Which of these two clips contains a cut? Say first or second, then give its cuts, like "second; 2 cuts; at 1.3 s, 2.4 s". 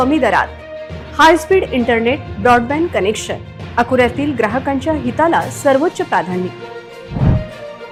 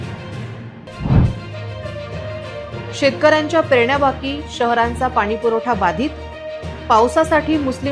second; 1 cut; at 0.9 s